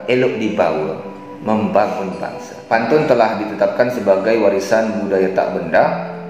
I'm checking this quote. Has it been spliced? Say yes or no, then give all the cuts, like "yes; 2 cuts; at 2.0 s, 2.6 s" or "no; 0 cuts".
yes; 1 cut; at 2.6 s